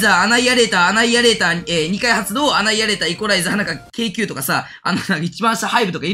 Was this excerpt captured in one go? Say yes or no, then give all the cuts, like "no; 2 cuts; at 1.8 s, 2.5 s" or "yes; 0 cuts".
yes; 0 cuts